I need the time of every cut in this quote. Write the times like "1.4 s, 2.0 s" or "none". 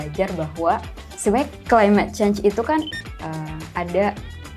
1.1 s, 2.9 s